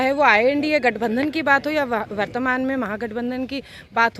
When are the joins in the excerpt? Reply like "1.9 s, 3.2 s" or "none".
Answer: none